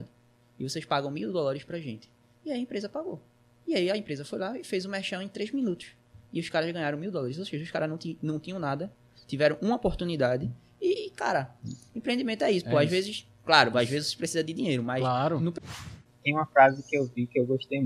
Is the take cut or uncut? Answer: cut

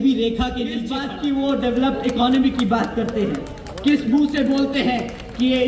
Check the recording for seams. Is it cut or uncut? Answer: cut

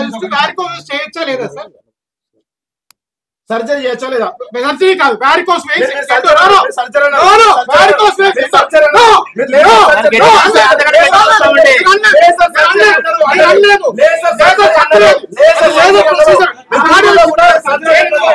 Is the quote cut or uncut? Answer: uncut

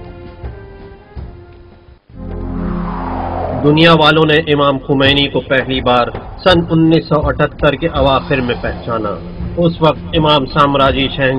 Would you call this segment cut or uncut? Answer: uncut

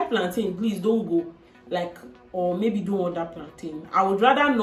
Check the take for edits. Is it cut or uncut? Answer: uncut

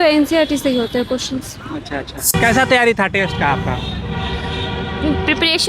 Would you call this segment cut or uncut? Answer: cut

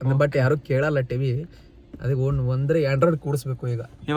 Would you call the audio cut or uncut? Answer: uncut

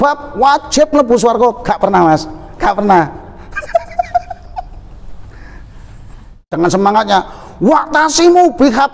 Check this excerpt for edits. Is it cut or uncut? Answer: cut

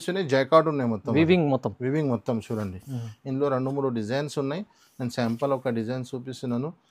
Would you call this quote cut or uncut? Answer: uncut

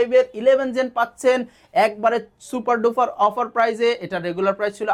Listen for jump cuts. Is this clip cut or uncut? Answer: uncut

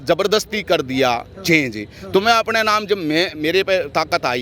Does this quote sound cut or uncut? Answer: uncut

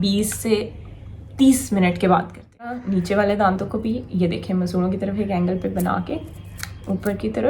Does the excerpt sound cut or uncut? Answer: cut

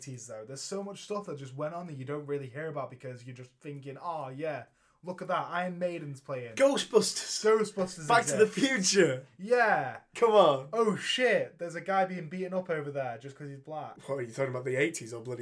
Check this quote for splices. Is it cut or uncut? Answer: cut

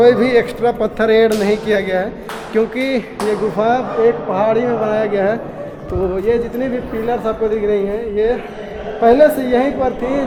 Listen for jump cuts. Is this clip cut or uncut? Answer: uncut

